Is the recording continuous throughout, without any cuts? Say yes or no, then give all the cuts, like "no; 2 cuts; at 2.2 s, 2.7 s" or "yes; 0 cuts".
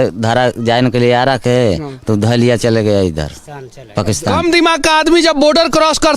no; 1 cut; at 4.4 s